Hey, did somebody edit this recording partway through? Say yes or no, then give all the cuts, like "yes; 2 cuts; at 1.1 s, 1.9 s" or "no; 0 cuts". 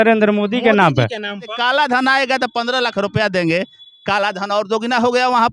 yes; 1 cut; at 1.5 s